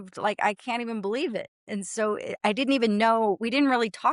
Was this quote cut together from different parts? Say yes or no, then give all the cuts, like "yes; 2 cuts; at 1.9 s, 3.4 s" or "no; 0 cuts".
no; 0 cuts